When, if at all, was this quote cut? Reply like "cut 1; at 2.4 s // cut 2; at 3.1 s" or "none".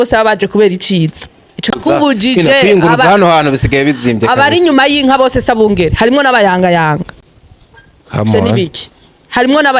cut 1; at 1.7 s